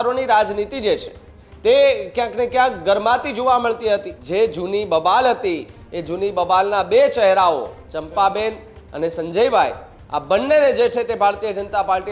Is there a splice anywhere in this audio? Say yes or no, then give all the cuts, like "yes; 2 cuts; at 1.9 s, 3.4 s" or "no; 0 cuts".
yes; 1 cut; at 4.2 s